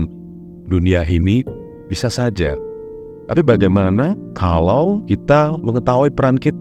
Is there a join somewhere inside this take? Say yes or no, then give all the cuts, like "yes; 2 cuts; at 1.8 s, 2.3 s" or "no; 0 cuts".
yes; 2 cuts; at 4.3 s, 5.2 s